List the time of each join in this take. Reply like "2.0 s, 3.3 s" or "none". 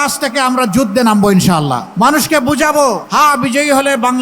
1.8 s, 3.0 s